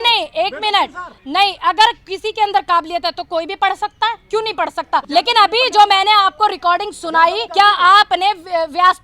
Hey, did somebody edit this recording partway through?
yes; 2 cuts; at 5.1 s, 7.4 s

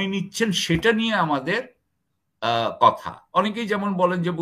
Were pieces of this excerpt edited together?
no; 0 cuts

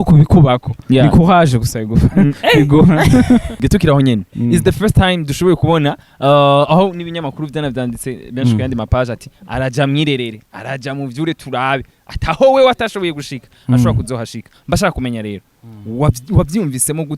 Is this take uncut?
no; 1 cut; at 3.6 s

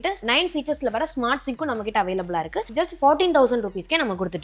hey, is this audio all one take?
yes; 0 cuts

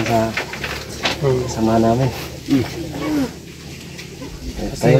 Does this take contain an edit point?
no; 0 cuts

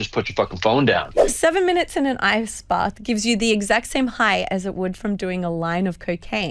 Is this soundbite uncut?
no; 1 cut; at 1.3 s

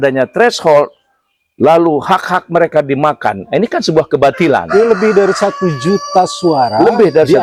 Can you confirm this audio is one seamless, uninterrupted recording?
yes; 0 cuts

